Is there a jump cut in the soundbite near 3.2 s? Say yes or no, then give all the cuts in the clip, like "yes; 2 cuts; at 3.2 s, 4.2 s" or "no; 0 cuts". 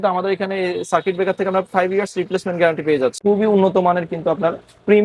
yes; 1 cut; at 3.2 s